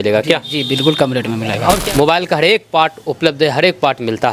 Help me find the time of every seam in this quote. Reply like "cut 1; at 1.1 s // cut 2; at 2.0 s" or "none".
cut 1; at 1.8 s